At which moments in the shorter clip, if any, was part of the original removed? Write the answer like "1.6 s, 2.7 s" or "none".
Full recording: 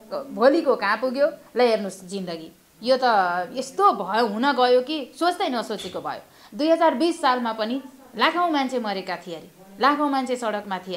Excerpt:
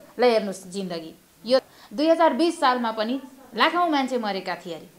1.6 s